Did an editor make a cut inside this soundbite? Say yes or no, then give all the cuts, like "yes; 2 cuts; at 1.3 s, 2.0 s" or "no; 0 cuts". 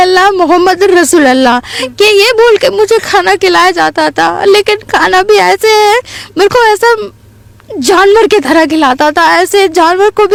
no; 0 cuts